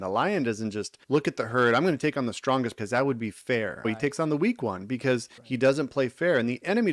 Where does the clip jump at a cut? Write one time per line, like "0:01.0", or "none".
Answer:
0:00.9
0:02.8
0:03.9
0:05.4